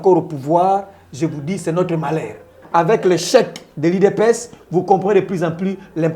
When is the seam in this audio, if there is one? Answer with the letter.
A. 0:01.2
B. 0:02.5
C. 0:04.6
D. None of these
B